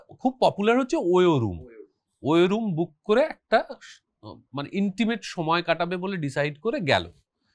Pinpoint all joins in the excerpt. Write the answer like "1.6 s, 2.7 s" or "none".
none